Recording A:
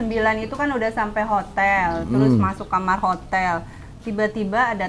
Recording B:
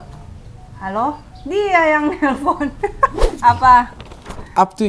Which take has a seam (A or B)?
B